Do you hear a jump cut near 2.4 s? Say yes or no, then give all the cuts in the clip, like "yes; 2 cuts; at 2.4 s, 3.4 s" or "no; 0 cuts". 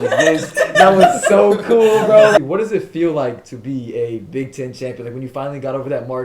yes; 1 cut; at 2.4 s